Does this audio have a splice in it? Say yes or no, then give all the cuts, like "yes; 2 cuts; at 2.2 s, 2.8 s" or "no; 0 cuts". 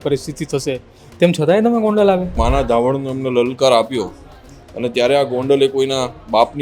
yes; 1 cut; at 2.4 s